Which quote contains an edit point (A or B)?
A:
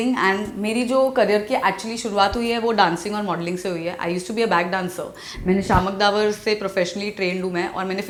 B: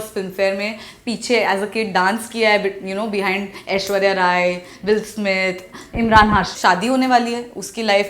B